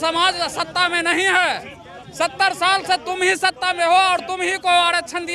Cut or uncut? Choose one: uncut